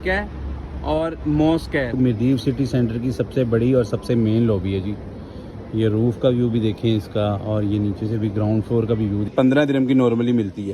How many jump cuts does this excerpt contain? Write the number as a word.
two